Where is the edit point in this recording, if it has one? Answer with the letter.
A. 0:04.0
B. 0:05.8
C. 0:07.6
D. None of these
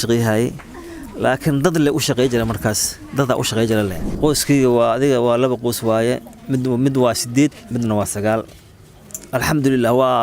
A